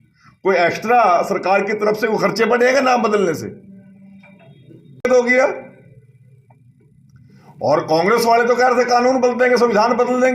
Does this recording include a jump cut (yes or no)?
yes